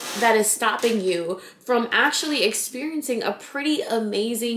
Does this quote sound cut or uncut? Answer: uncut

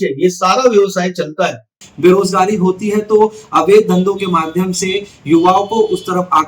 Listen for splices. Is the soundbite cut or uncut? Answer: cut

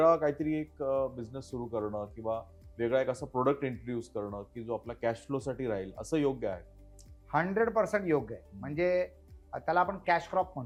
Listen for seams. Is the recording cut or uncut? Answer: uncut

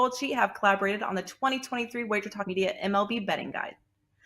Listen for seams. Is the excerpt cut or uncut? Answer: cut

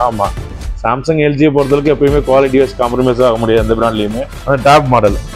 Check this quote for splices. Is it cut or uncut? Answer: cut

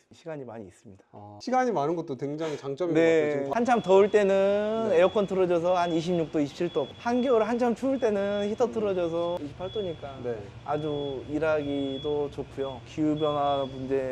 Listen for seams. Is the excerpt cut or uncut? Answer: cut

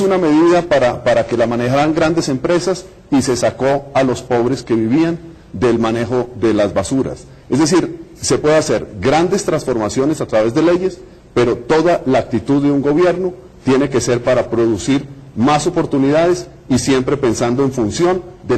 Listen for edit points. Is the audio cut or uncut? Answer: cut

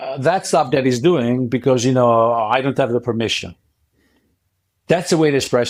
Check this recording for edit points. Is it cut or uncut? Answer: uncut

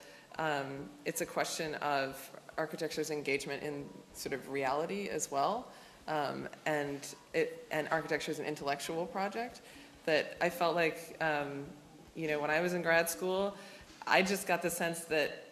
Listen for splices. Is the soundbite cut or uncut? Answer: uncut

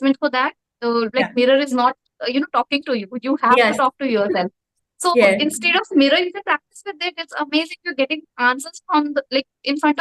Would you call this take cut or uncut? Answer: uncut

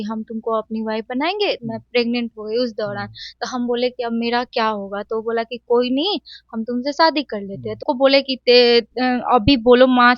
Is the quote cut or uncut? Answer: cut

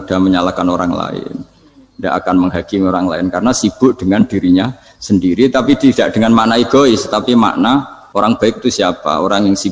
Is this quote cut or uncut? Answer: cut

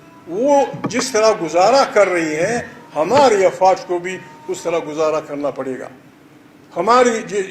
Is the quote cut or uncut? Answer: uncut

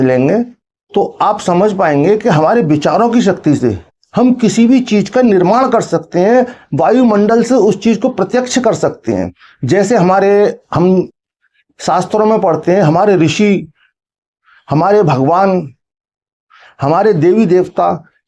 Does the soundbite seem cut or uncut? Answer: uncut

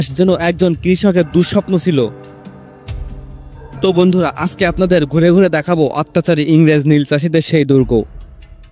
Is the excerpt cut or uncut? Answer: uncut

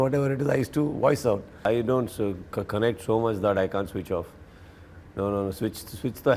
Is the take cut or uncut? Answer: cut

